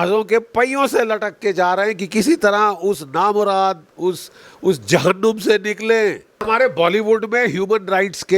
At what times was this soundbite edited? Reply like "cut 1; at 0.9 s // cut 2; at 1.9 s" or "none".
cut 1; at 6.4 s